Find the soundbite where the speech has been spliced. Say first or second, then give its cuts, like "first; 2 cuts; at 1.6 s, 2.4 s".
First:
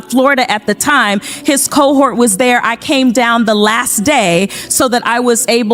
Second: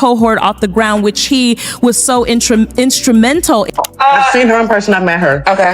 second; 1 cut; at 3.7 s